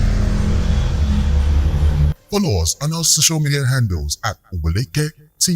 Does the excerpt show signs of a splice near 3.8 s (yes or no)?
no